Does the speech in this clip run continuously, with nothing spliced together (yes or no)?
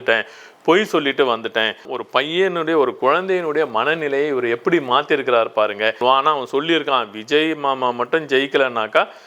no